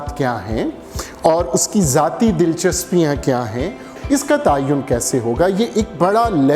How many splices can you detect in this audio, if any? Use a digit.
1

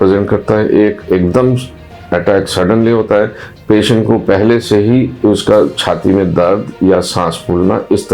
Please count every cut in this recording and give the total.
1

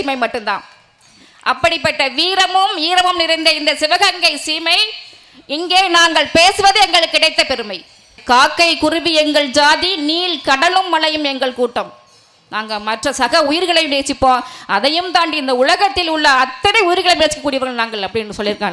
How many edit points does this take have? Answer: 1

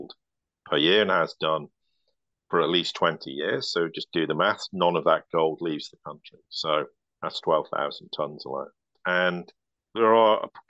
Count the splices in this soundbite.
1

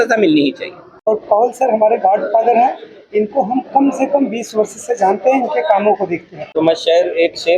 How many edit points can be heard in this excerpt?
2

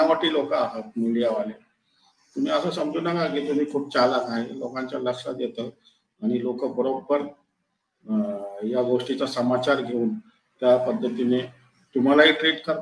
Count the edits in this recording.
0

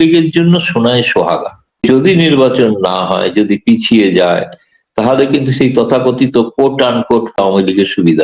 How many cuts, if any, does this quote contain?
2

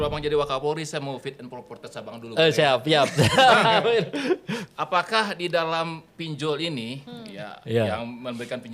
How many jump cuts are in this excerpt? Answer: 0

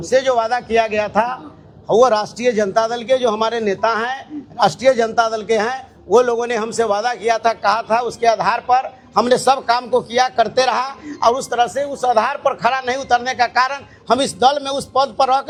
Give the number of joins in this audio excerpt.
0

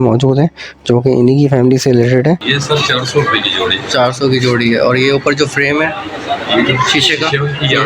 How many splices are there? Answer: 1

